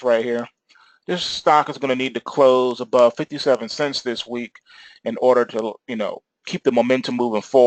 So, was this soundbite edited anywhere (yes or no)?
no